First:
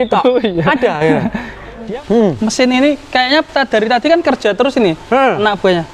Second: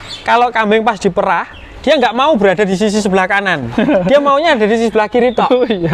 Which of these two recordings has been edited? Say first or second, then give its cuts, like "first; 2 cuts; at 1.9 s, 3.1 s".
first; 1 cut; at 1.8 s